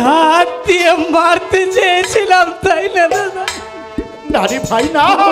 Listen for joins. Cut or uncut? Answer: uncut